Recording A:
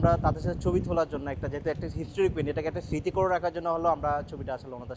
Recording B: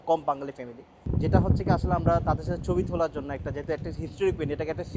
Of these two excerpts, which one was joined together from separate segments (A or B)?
B